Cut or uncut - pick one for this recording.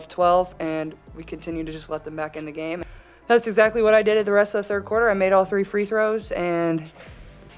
cut